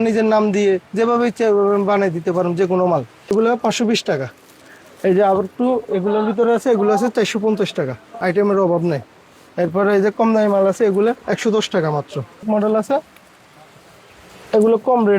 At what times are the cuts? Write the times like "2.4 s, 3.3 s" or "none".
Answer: 3.2 s, 8.1 s, 12.4 s